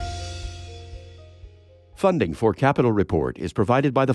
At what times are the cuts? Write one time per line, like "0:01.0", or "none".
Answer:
0:01.9